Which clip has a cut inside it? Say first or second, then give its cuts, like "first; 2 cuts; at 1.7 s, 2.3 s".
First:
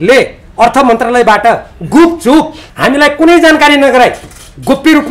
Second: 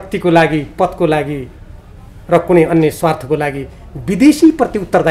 first; 1 cut; at 2.6 s